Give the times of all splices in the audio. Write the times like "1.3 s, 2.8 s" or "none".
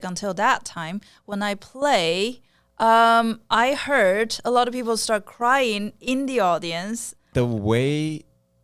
7.2 s

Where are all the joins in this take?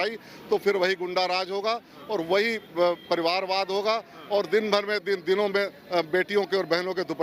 none

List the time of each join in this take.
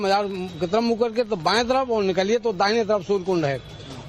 none

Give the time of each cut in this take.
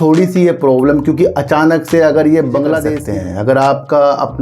3.0 s

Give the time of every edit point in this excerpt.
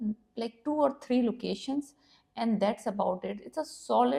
none

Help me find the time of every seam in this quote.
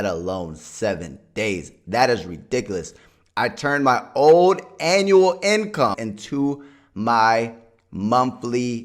6.0 s

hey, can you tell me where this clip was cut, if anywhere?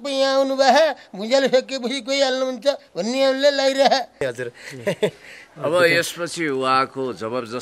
4.2 s

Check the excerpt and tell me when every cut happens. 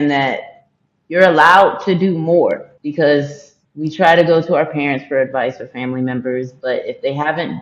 2.8 s

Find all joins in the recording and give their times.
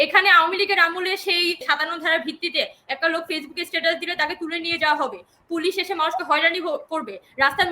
1.6 s

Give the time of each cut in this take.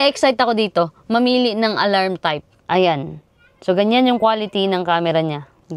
2.7 s

